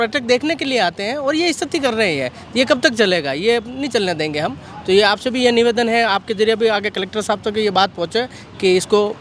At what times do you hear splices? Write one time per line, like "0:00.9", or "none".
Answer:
none